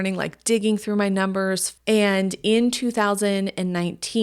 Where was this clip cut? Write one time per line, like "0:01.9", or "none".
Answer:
0:01.7